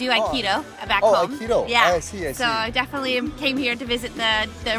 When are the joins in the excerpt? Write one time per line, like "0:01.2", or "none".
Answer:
none